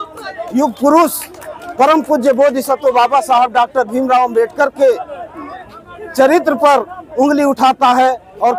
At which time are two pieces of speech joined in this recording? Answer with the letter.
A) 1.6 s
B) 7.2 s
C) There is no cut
C